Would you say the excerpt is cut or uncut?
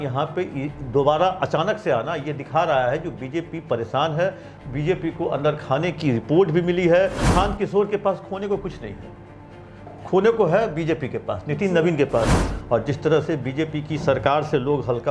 cut